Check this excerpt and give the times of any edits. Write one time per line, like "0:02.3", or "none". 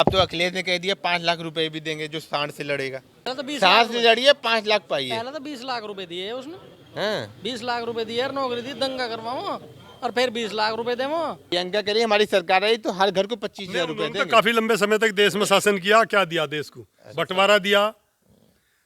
0:03.4
0:11.4